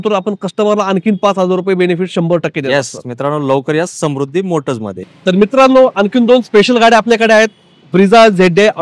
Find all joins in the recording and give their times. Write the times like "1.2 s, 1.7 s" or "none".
5.0 s

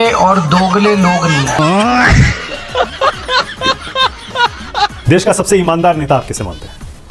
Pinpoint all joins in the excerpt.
5.0 s

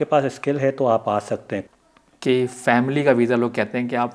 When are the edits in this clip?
1.6 s

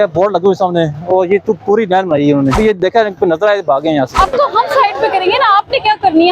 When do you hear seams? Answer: 2.6 s, 4.1 s

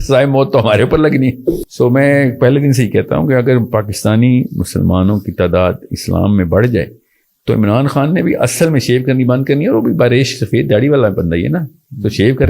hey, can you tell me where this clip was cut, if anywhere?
1.7 s

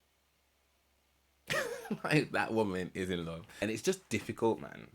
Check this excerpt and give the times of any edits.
3.6 s

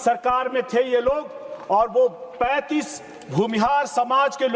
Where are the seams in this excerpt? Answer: none

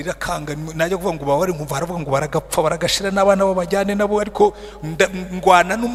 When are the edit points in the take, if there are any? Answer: none

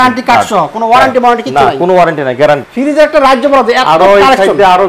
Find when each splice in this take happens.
2.6 s

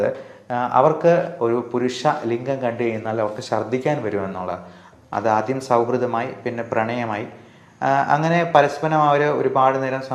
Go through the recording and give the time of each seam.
1.3 s, 4.8 s

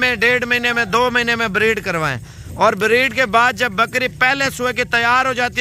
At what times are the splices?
none

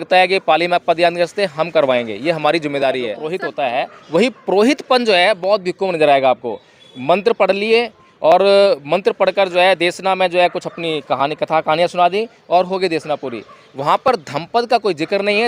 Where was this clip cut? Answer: 3.0 s

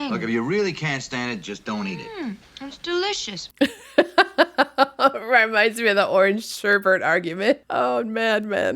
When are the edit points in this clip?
7.7 s

